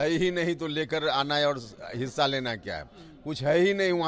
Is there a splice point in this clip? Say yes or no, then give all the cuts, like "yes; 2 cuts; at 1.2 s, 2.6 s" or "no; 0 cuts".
no; 0 cuts